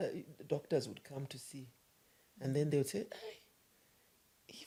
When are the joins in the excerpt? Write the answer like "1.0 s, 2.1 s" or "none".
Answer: none